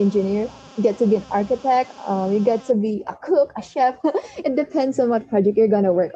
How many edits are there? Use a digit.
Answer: 0